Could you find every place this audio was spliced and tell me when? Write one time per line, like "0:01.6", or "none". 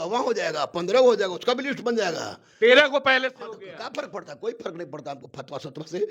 none